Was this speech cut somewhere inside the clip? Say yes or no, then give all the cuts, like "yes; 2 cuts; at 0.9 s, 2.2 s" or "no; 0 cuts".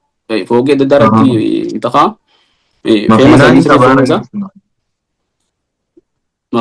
no; 0 cuts